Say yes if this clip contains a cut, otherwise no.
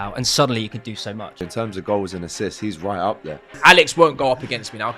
yes